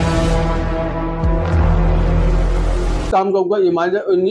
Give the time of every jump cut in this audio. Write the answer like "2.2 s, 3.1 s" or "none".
3.1 s